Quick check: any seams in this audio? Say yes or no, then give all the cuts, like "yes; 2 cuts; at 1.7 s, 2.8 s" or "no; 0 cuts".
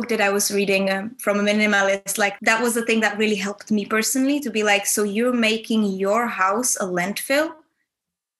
yes; 1 cut; at 2.4 s